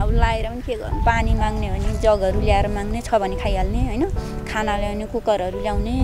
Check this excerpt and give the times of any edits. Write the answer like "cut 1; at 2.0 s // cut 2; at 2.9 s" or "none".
cut 1; at 0.9 s